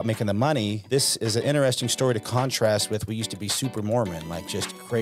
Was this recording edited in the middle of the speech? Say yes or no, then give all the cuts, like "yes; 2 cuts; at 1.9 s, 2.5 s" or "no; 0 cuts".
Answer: no; 0 cuts